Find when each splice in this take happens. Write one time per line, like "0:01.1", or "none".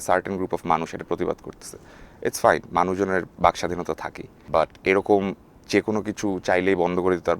0:04.3